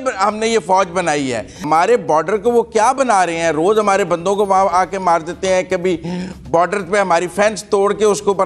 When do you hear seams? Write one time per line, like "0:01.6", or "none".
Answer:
0:01.6